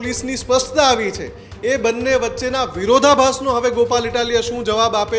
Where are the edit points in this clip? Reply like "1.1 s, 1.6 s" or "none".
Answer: none